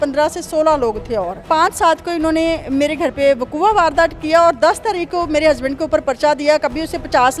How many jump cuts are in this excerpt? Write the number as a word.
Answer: one